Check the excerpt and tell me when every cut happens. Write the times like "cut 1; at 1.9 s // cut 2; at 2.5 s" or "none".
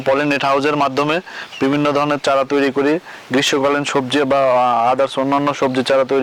none

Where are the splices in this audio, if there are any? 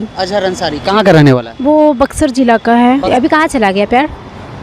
cut 1; at 2.9 s

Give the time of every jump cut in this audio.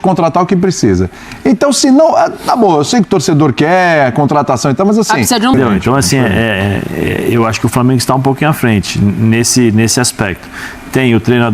cut 1; at 5.5 s

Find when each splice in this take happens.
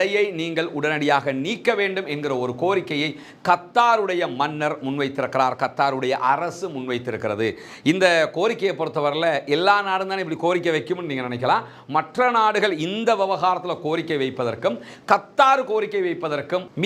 none

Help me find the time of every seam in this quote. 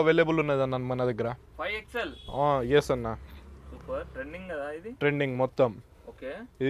none

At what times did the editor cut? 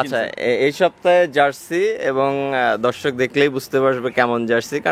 none

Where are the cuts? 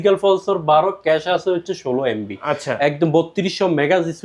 none

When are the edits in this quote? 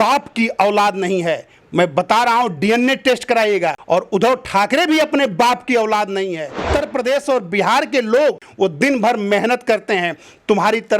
cut 1; at 3.8 s // cut 2; at 6.6 s // cut 3; at 8.5 s

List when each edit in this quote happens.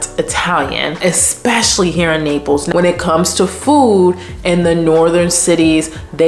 cut 1; at 0.9 s // cut 2; at 2.7 s

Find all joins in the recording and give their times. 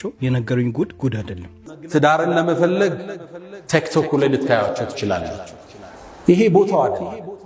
cut 1; at 1.6 s

